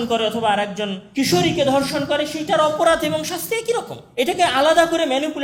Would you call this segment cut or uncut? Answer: uncut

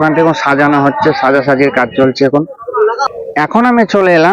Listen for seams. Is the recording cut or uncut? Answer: cut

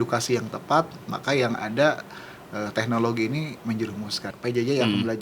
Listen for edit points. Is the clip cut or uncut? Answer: cut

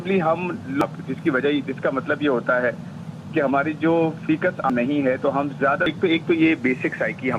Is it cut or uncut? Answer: cut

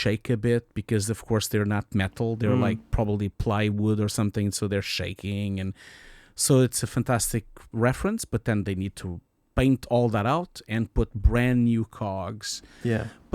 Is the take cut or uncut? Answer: cut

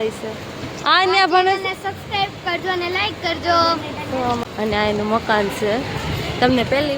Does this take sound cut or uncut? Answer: cut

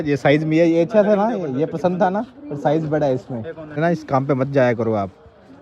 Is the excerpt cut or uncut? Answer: cut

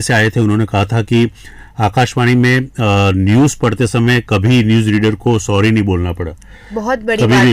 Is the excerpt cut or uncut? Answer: uncut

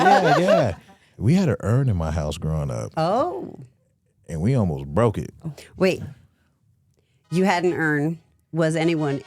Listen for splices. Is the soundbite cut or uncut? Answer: cut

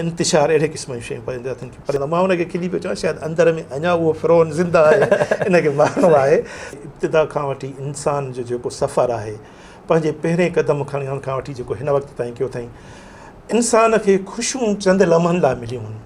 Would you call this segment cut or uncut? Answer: cut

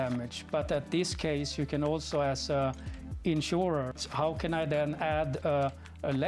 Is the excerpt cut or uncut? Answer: cut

